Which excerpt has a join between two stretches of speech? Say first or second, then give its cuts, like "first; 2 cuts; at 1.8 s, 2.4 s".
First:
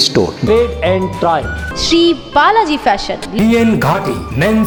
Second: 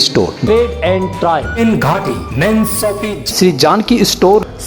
second; 1 cut; at 1.6 s